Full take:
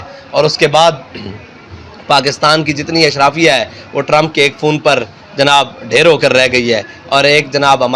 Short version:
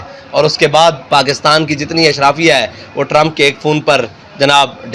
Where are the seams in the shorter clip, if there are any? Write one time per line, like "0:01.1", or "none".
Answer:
0:01.0